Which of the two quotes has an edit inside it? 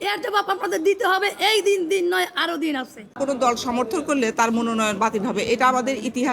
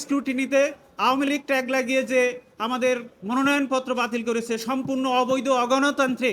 first; 1 cut; at 3.2 s

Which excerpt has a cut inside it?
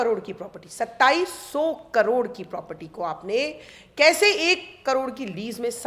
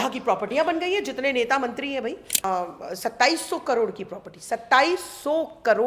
second; 1 cut; at 2.3 s

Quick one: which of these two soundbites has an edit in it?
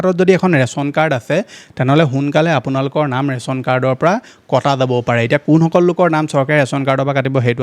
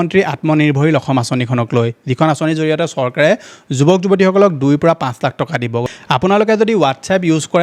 second; 1 cut; at 5.8 s

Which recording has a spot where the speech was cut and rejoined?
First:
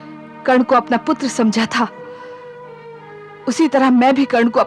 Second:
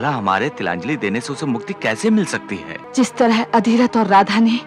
second; 1 cut; at 2.8 s

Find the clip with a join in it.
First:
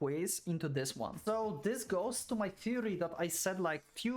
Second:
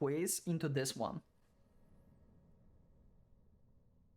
first; 1 cut; at 1.2 s

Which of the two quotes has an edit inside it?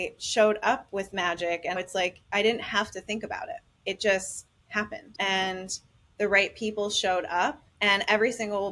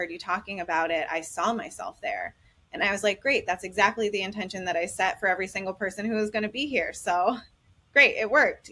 first; 4 cuts; at 1.8 s, 3.7 s, 5.0 s, 7.7 s

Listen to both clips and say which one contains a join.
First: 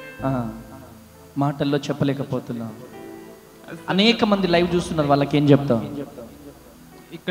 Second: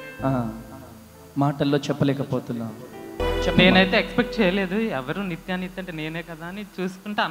second; 1 cut; at 3.2 s

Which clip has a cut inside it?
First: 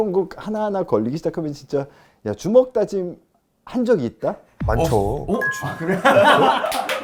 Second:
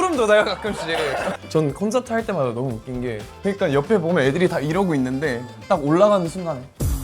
second; 2 cuts; at 1.1 s, 3.3 s

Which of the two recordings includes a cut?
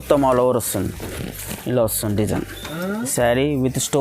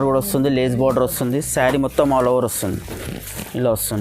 first; 1 cut; at 3.1 s

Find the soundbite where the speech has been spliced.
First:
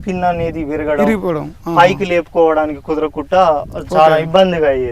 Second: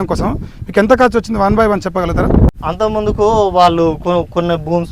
second; 1 cut; at 2.5 s

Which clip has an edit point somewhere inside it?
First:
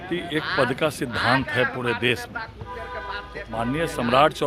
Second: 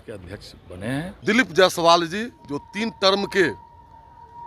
second; 1 cut; at 1.1 s

